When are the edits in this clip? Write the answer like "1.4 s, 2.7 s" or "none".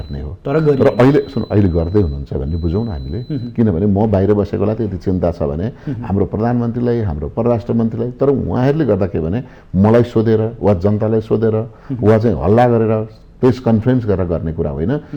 none